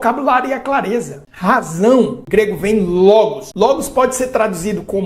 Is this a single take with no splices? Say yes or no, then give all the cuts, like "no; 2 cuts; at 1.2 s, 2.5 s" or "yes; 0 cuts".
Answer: no; 3 cuts; at 1.2 s, 2.2 s, 3.4 s